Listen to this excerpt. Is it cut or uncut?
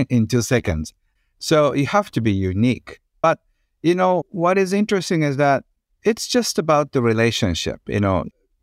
uncut